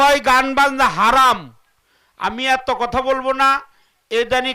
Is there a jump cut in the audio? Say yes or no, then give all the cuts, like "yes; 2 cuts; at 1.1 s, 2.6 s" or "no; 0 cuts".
no; 0 cuts